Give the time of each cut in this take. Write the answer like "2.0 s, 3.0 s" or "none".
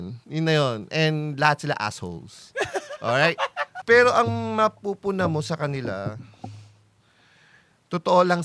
3.7 s